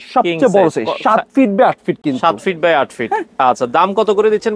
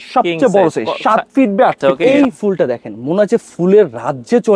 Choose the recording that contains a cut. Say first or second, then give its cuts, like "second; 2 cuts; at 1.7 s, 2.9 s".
second; 1 cut; at 2.0 s